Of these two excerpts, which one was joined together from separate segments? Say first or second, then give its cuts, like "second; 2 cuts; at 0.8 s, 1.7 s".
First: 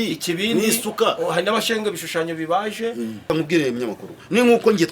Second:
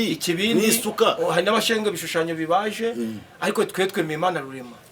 first; 1 cut; at 3.3 s